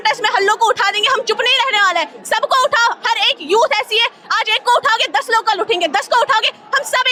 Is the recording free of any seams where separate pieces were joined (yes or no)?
yes